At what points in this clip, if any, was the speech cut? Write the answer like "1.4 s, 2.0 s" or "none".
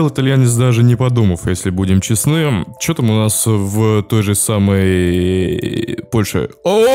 none